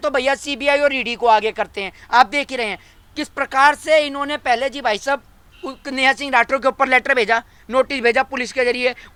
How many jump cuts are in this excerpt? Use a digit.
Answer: 0